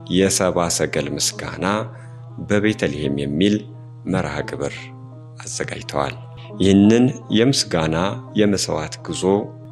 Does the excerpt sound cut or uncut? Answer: uncut